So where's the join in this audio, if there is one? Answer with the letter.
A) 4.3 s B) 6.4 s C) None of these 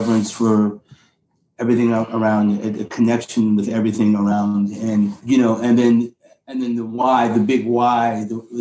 A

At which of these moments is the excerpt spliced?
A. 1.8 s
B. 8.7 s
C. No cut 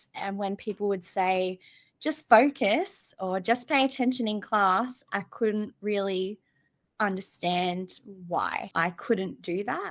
B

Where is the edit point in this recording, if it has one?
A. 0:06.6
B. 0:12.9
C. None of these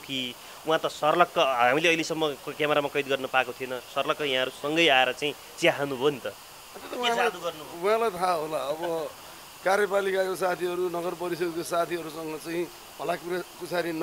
C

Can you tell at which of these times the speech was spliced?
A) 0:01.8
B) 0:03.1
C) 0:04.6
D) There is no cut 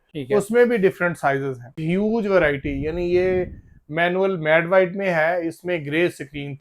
A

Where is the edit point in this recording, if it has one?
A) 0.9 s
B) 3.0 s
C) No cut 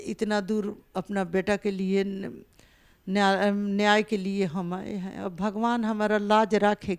C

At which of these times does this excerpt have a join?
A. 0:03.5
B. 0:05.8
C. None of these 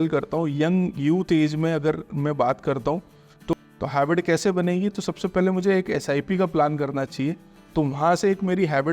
A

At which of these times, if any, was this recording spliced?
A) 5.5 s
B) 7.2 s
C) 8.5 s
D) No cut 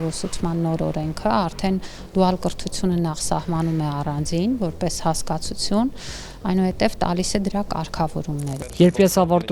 C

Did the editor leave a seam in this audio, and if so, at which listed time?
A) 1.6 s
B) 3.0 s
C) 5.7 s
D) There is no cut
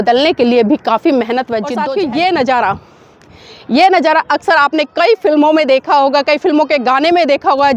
A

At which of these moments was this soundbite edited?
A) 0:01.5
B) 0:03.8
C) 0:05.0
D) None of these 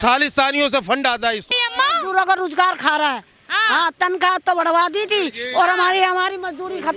A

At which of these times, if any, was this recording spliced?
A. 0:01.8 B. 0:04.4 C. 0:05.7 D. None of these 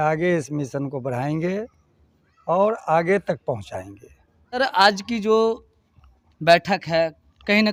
D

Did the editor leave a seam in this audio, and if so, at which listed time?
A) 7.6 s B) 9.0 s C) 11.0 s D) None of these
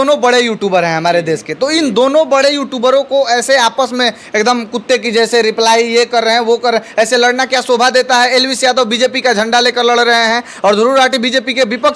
D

